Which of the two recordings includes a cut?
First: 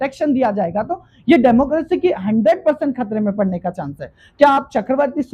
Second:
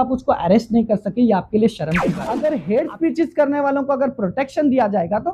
second; 1 cut; at 2.4 s

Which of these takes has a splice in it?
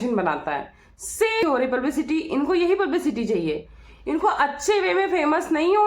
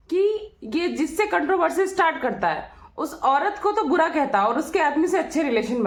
first; 1 cut; at 1.4 s

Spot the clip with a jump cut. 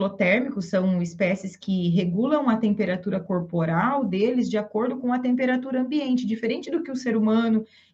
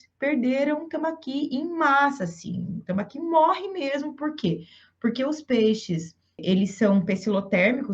second; 1 cut; at 6.4 s

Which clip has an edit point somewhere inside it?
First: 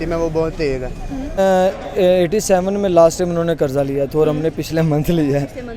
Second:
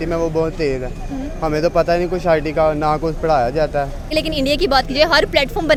first; 1 cut; at 1.4 s

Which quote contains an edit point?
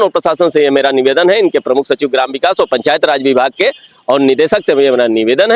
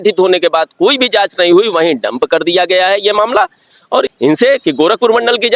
second; 1 cut; at 4.1 s

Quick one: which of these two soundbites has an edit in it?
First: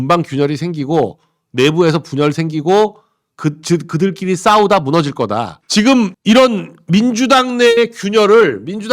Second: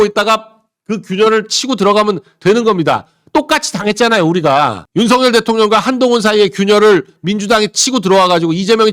first; 1 cut; at 5.6 s

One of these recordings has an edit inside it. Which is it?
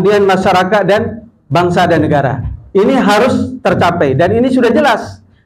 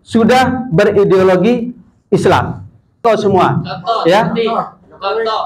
second; 1 cut; at 3.0 s

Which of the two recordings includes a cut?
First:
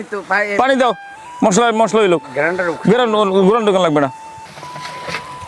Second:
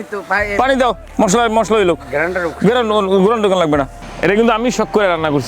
second; 2 cuts; at 1.0 s, 4.0 s

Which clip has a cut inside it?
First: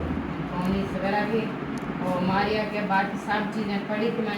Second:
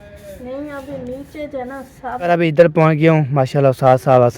second; 1 cut; at 2.2 s

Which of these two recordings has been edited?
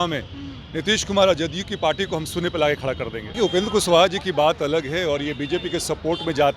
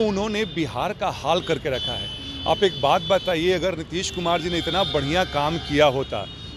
first; 1 cut; at 3.2 s

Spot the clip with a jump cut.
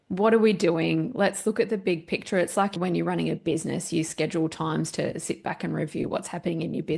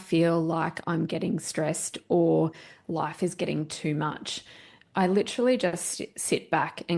first; 1 cut; at 2.8 s

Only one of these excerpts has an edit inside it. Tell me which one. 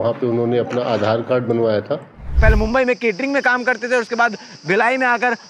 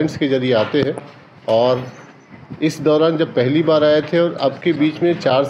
first; 1 cut; at 2.2 s

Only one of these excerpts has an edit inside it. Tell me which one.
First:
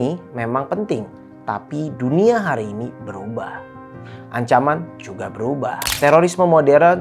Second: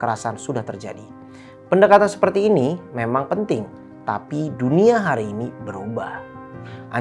first; 1 cut; at 5.8 s

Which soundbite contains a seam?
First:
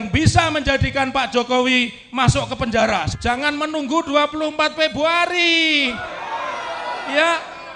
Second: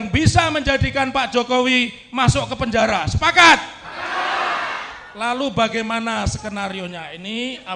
first; 1 cut; at 3.1 s

